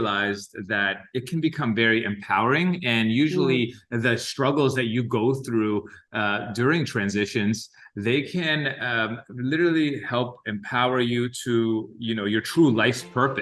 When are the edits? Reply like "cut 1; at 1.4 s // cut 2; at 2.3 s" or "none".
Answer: none